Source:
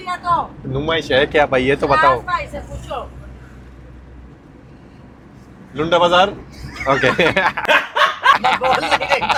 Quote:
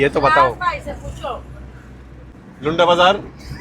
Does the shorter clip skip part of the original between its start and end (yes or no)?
yes